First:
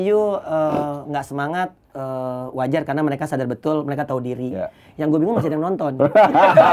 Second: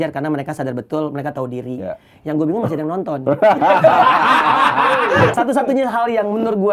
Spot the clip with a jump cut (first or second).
second